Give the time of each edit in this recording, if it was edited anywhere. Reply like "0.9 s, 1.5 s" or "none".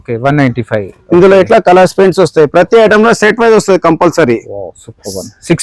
none